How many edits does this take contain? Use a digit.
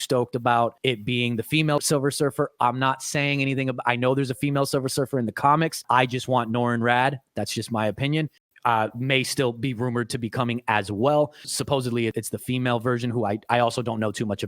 2